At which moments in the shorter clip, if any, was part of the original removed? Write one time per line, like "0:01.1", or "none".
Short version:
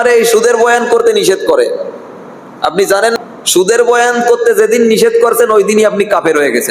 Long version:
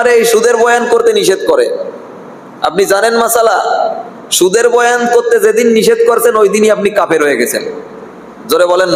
0:03.2